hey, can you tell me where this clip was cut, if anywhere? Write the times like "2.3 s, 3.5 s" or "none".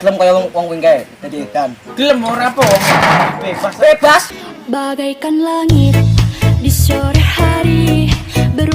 4.3 s